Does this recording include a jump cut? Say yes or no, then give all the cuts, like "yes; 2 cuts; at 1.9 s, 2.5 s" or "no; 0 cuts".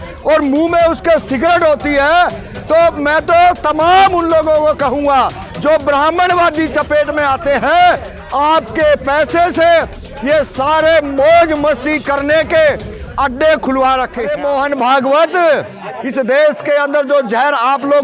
yes; 1 cut; at 14.2 s